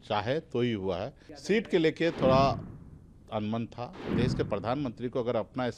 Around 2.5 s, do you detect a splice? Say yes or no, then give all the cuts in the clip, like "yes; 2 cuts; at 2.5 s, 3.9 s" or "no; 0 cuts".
no; 2 cuts; at 1.3 s, 4.1 s